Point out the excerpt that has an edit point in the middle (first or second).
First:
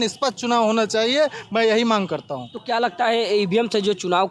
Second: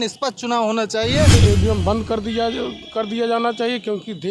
second